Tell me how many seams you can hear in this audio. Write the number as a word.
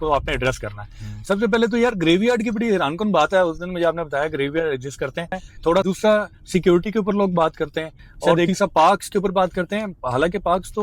two